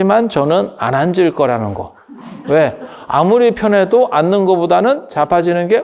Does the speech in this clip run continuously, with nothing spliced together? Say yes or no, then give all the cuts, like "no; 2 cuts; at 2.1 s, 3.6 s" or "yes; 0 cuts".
yes; 0 cuts